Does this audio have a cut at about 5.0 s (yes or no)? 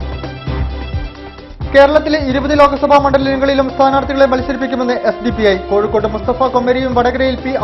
no